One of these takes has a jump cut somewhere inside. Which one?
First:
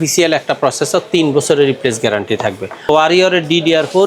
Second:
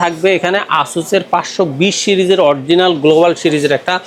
first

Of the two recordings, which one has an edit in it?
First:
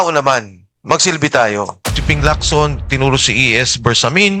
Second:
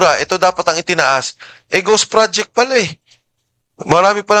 first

